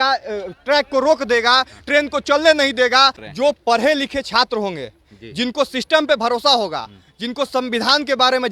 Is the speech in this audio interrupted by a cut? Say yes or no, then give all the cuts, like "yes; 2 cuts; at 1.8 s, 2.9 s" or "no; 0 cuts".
yes; 1 cut; at 3.2 s